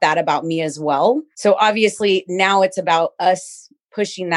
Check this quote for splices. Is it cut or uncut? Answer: cut